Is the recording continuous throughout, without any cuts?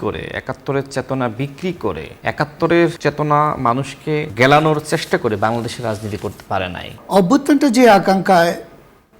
no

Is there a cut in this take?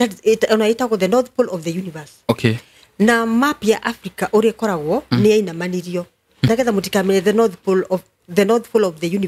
yes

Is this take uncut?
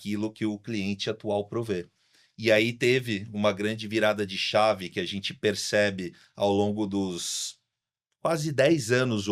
yes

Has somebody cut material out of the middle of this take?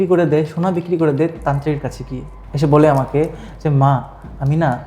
yes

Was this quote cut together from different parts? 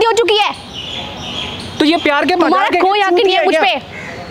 no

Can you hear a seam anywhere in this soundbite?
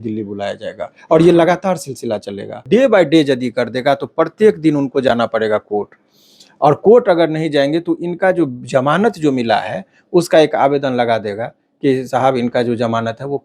yes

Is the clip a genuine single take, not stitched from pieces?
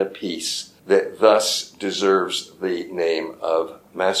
yes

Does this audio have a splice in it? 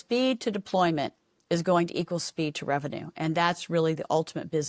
no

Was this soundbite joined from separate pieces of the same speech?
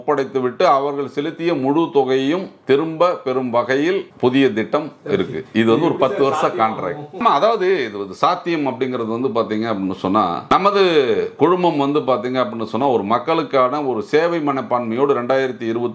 no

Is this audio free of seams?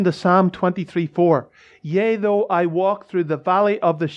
yes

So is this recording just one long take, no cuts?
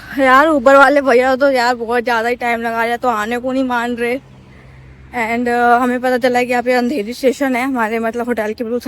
yes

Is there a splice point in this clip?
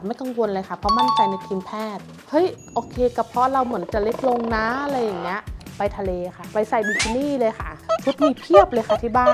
yes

